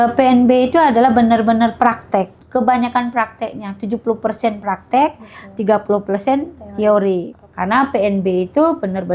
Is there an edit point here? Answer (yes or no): yes